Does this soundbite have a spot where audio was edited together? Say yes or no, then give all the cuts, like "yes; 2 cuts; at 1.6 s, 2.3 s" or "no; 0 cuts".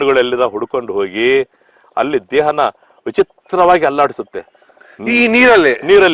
no; 0 cuts